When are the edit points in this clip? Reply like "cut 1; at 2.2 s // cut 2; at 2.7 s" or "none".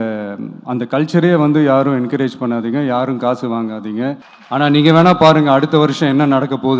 cut 1; at 4.3 s